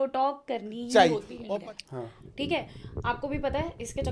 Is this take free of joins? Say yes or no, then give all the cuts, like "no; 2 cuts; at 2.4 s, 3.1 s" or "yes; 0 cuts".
no; 1 cut; at 1.3 s